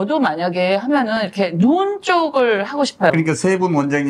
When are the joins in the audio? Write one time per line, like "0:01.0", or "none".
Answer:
0:03.1